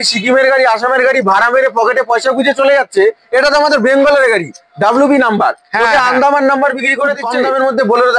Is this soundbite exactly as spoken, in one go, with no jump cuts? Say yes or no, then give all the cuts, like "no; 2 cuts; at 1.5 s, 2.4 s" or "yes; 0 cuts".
no; 1 cut; at 7.3 s